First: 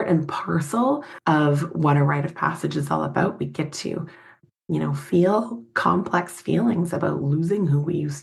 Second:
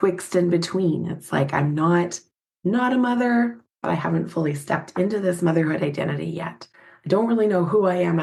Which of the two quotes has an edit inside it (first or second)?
first